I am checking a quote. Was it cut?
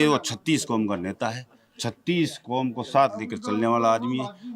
no; 0 cuts

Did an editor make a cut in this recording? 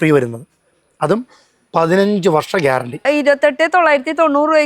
yes; 1 cut; at 3.0 s

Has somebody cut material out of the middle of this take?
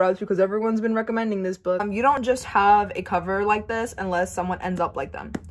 yes; 1 cut; at 2.2 s

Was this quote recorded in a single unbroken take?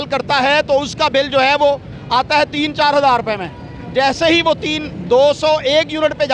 yes; 0 cuts

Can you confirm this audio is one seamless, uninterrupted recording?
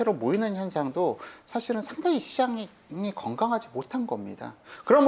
yes; 0 cuts

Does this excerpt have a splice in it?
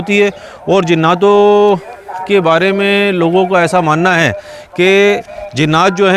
no; 0 cuts

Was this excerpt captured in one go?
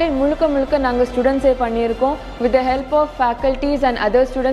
yes; 0 cuts

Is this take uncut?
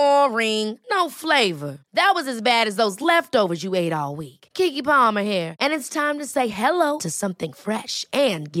yes; 0 cuts

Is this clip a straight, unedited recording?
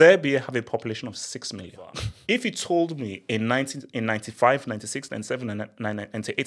no; 1 cut; at 2.1 s

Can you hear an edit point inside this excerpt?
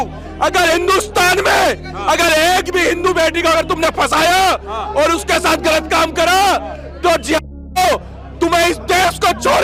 no; 0 cuts

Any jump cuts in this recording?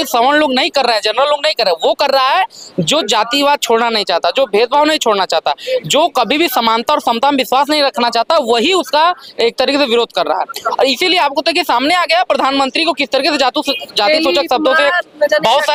no; 0 cuts

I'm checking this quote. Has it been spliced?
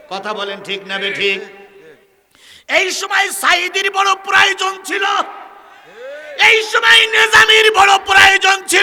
no; 0 cuts

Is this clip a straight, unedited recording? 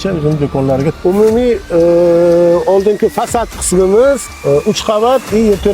no; 2 cuts; at 1.0 s, 4.3 s

